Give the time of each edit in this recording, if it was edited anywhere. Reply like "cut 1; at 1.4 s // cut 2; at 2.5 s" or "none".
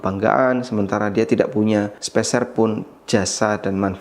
cut 1; at 2.0 s